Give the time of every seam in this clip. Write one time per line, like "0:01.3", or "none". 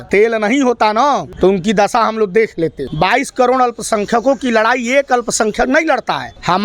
0:02.8